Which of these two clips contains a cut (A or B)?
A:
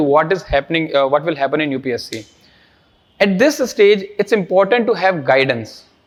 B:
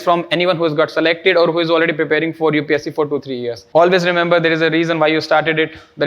B